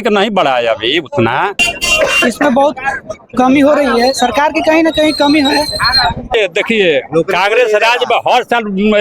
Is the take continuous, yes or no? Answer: no